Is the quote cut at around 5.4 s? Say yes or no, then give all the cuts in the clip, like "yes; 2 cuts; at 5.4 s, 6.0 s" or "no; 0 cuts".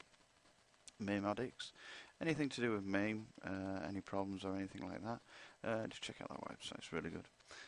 no; 0 cuts